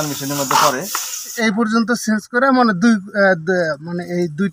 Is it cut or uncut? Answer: cut